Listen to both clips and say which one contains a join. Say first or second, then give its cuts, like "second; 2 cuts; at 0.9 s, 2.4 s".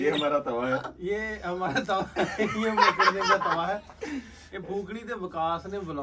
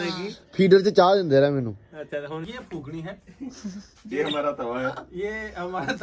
second; 1 cut; at 2.4 s